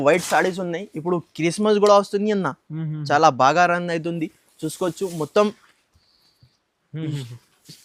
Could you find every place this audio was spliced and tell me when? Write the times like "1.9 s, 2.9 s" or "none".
none